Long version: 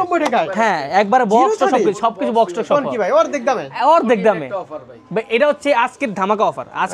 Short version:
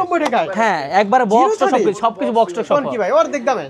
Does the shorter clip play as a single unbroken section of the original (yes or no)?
yes